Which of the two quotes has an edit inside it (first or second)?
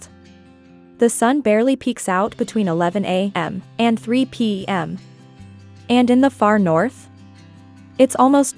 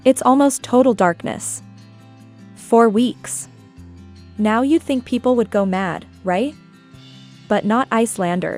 first